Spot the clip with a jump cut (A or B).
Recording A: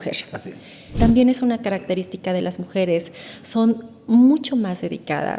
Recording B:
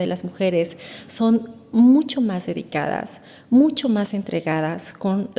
A